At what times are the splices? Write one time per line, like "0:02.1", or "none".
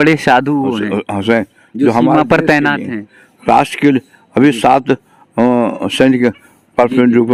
none

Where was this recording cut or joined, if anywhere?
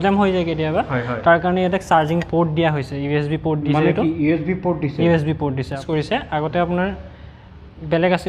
0:05.8

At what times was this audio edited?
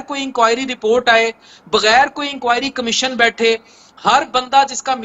none

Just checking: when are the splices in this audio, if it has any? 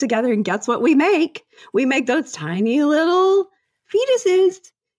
none

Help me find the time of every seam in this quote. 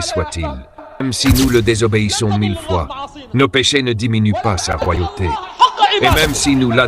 0:01.0
0:06.1

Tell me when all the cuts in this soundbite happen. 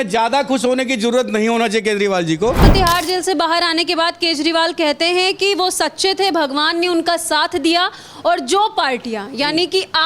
0:02.6

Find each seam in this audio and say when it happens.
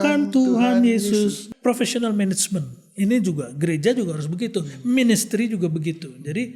0:01.4

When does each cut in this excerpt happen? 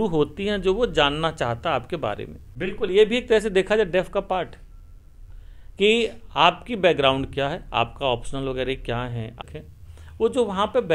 0:02.5
0:09.4

